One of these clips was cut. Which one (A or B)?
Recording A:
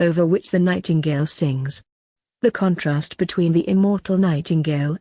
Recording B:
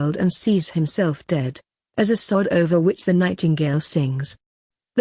B